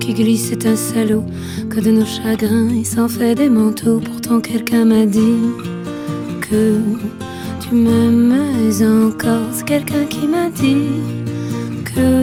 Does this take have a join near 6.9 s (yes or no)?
no